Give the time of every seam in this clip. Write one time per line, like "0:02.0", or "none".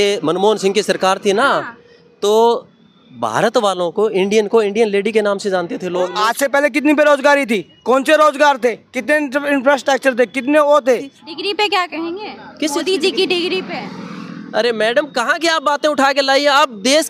0:06.1
0:11.2